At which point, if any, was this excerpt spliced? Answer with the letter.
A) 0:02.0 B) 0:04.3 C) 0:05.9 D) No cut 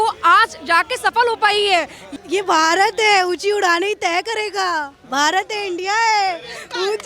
A